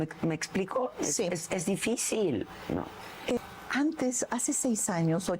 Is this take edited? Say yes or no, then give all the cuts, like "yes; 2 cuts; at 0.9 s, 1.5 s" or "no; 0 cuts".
yes; 1 cut; at 3.4 s